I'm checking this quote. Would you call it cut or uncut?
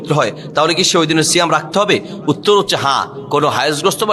uncut